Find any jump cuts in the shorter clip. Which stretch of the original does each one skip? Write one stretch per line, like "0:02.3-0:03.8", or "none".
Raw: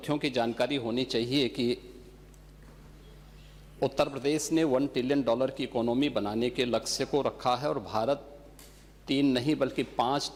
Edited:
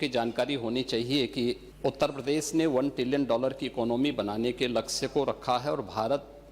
0:01.9-0:03.7